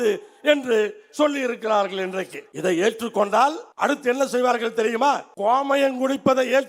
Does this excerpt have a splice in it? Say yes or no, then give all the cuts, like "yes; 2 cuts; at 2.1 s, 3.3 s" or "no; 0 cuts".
yes; 3 cuts; at 2.4 s, 3.7 s, 5.3 s